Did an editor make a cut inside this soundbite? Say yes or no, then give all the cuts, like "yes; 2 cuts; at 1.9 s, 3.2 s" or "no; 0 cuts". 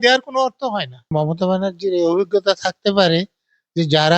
yes; 1 cut; at 1.2 s